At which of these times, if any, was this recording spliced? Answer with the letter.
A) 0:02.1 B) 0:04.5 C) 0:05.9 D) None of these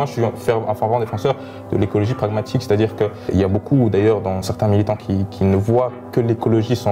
B